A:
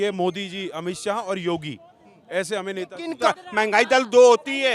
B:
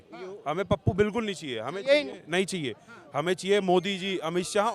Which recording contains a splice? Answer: A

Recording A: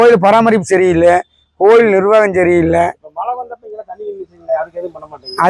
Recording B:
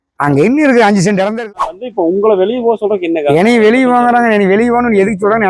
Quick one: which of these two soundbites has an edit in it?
B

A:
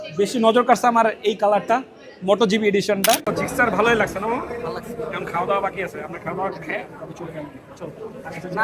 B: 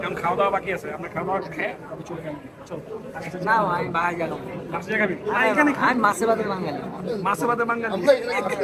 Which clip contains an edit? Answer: A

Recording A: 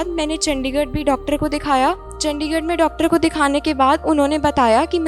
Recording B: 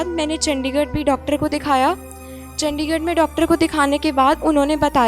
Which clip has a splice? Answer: A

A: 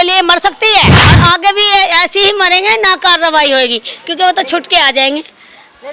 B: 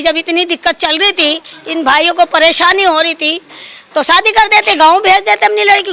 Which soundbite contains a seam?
A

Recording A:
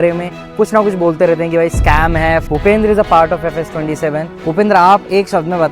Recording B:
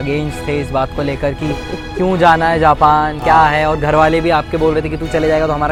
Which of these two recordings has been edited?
A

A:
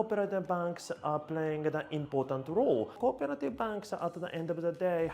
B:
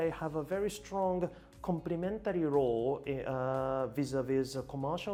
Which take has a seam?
A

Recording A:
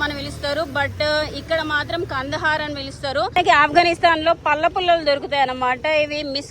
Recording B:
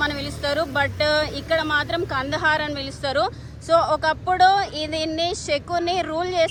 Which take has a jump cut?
A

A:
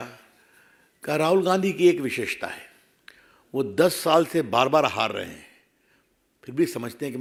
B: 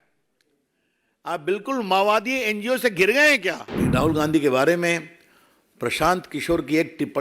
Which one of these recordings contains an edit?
B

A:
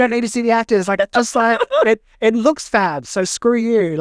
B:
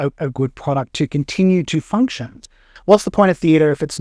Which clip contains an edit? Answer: B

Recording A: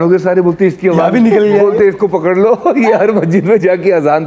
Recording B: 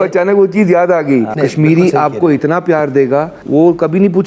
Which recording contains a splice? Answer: B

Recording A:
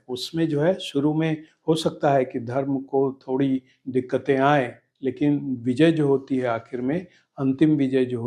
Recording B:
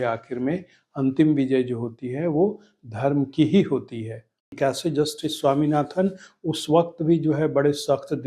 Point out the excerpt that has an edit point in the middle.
B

